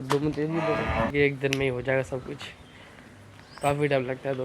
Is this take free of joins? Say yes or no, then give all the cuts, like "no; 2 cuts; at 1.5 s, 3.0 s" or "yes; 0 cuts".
no; 1 cut; at 1.1 s